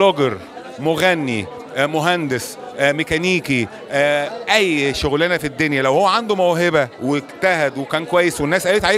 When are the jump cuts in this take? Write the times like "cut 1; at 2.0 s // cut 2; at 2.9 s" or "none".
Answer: none